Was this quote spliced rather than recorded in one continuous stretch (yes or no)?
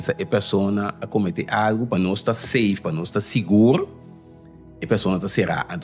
no